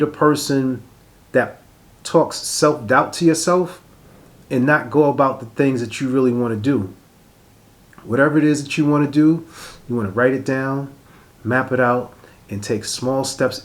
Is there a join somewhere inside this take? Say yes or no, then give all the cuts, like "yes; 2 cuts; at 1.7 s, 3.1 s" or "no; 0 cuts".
no; 0 cuts